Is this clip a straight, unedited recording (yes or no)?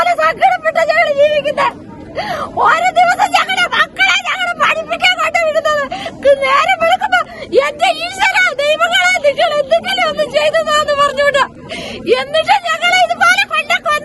yes